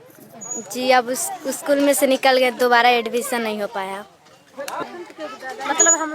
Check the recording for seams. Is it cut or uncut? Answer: cut